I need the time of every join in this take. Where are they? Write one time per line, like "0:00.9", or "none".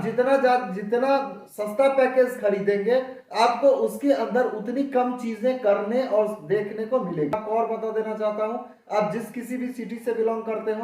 0:07.4